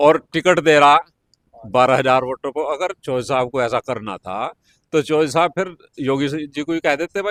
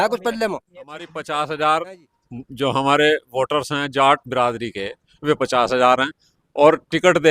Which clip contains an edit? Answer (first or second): second